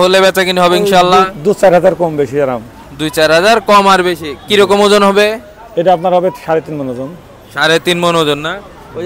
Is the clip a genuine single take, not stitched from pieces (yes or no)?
yes